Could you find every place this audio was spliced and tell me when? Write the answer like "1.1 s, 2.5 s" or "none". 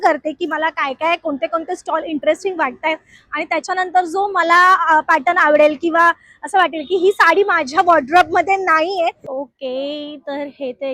9.5 s